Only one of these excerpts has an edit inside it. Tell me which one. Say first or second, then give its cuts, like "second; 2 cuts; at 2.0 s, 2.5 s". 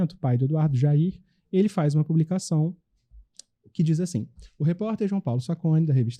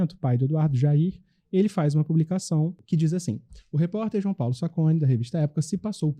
second; 1 cut; at 2.8 s